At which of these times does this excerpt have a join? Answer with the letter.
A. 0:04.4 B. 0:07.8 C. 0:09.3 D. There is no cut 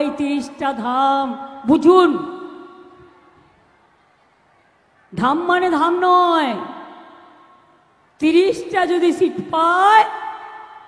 D